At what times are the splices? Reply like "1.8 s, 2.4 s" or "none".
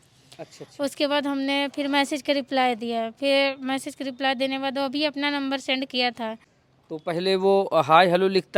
none